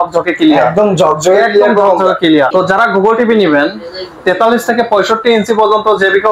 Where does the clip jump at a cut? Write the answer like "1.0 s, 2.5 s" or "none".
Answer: 2.5 s